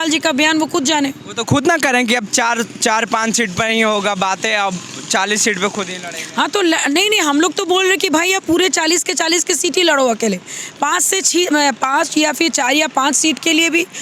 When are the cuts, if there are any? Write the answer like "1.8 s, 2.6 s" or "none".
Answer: none